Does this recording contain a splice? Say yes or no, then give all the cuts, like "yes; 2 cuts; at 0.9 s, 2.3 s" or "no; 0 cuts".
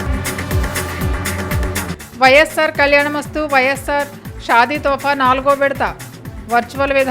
yes; 1 cut; at 1.9 s